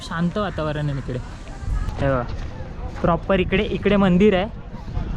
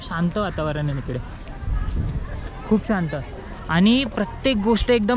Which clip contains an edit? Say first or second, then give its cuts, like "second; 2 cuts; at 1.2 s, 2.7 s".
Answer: first; 1 cut; at 1.8 s